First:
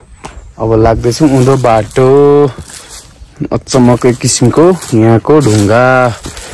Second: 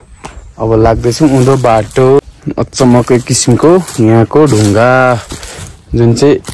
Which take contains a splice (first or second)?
second